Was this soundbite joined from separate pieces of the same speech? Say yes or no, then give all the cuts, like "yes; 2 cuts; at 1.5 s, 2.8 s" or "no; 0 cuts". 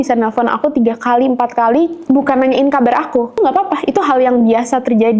yes; 1 cut; at 3.3 s